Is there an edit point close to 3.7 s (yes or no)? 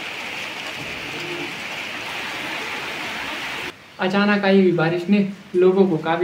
yes